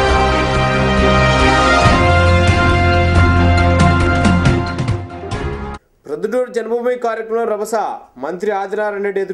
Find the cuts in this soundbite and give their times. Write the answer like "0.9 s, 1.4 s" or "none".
5.6 s